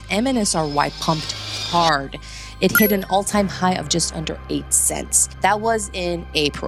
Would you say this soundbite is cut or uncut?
uncut